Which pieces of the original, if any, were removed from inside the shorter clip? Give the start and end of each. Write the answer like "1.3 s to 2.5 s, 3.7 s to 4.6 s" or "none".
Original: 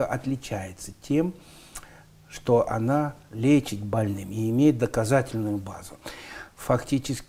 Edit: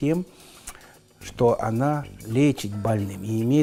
none